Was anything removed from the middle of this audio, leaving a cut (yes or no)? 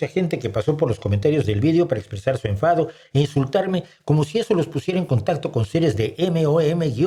no